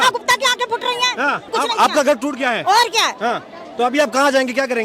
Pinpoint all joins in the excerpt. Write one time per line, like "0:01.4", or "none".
0:01.4